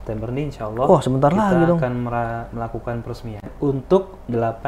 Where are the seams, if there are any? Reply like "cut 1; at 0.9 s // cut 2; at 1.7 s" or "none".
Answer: cut 1; at 3.5 s

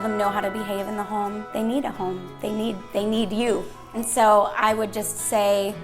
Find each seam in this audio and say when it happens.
cut 1; at 1.5 s // cut 2; at 3.9 s

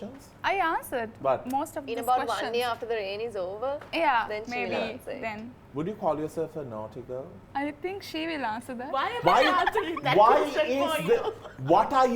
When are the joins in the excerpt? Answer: cut 1; at 5.5 s // cut 2; at 7.4 s

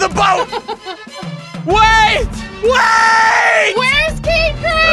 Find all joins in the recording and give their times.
none

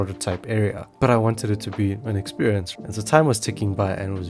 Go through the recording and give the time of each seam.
cut 1; at 2.7 s

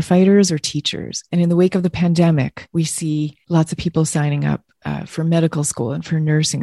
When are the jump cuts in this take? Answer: cut 1; at 1.2 s // cut 2; at 3.2 s

